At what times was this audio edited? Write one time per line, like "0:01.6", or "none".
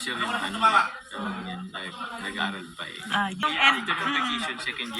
0:03.4